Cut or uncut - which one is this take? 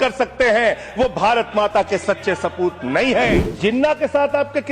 cut